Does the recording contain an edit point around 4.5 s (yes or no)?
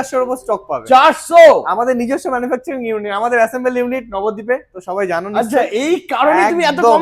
no